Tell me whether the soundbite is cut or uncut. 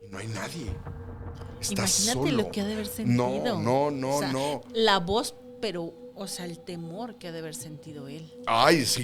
uncut